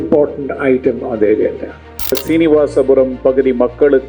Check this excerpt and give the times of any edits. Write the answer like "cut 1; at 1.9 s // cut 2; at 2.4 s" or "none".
cut 1; at 2.2 s